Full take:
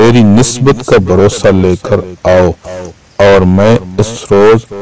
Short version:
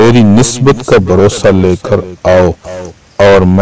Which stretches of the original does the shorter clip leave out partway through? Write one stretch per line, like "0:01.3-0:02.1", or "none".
none

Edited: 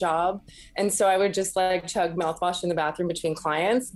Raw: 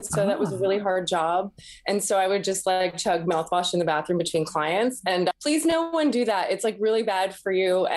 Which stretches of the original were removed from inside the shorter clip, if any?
none

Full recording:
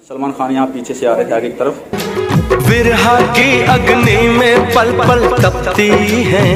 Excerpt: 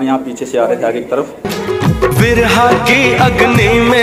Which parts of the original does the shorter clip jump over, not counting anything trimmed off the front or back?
none

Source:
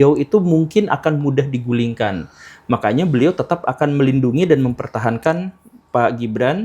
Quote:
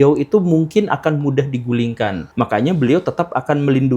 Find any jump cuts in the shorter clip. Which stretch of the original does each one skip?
0:02.2-0:02.6

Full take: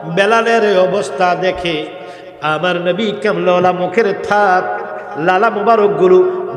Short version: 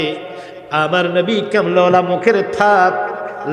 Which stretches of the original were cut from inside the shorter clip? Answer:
none

